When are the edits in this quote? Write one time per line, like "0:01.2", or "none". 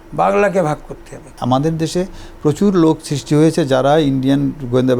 0:01.3

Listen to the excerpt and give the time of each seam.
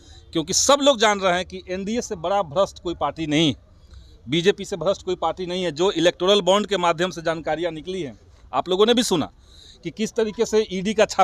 none

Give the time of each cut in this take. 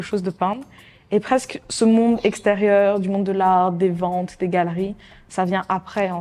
none

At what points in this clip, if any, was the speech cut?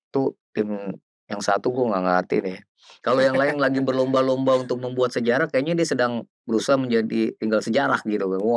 none

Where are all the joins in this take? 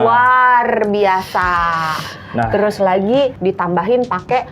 none

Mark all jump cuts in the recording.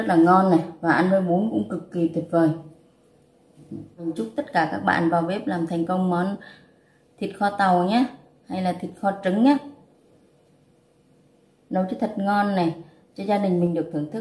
0:04.1

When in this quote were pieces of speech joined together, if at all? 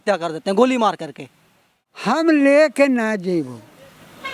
0:02.1

